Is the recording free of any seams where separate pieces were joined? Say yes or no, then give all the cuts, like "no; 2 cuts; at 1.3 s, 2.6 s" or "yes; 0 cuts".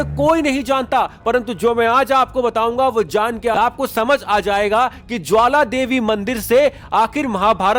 yes; 0 cuts